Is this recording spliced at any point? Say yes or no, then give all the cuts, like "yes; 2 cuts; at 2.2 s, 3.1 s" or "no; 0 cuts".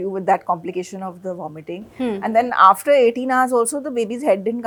no; 0 cuts